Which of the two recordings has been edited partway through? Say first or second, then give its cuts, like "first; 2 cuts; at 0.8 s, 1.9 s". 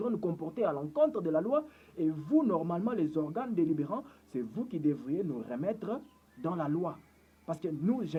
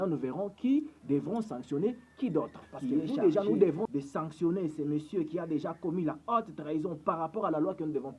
second; 1 cut; at 3.9 s